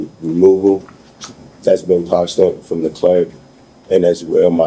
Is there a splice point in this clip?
no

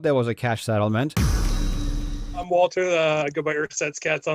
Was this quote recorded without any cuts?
no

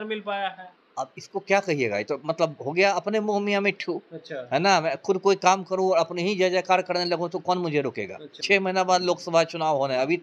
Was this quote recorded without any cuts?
no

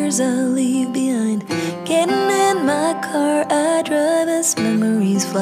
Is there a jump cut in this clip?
no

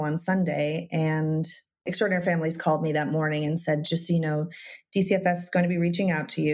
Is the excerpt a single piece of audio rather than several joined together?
no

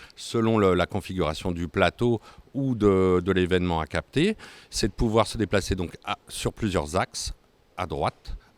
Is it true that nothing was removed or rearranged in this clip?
yes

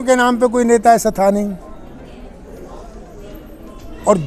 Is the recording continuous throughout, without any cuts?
yes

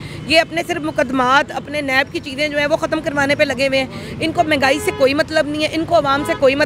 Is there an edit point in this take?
no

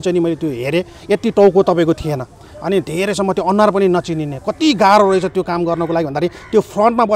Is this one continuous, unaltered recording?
yes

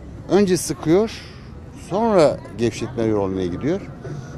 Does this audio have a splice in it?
no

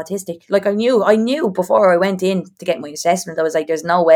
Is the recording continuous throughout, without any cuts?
yes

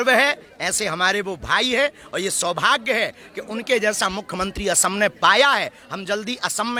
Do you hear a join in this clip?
no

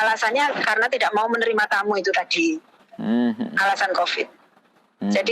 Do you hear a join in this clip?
yes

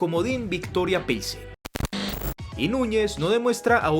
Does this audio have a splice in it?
yes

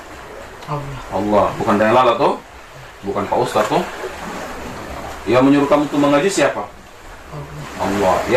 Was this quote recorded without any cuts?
yes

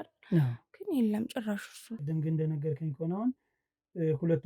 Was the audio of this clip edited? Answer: yes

